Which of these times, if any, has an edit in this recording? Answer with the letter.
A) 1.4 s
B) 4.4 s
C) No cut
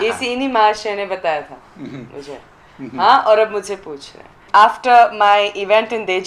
B